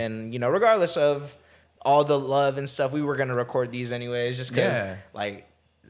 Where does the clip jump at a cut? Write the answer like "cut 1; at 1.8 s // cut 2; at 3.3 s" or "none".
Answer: none